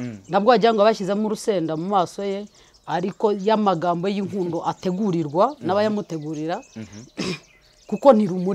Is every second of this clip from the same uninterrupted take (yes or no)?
yes